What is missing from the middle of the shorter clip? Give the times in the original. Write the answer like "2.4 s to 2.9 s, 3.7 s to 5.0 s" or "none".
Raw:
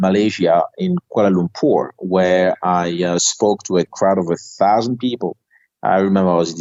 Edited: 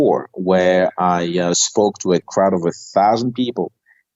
none